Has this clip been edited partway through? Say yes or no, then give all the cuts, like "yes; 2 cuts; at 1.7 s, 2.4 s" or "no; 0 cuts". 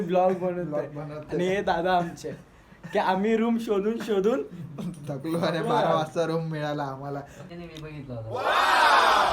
yes; 1 cut; at 7.4 s